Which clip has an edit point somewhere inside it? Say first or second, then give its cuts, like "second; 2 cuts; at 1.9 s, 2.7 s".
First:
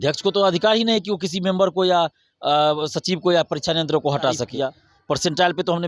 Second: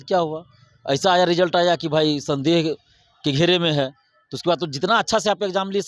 first; 1 cut; at 4.5 s